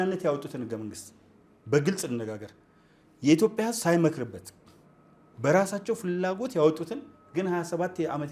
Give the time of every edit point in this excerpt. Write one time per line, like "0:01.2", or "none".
none